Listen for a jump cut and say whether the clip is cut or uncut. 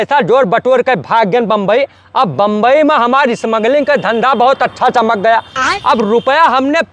uncut